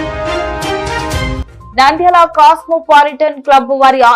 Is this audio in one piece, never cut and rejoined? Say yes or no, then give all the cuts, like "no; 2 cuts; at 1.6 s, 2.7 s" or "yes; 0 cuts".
no; 1 cut; at 1.4 s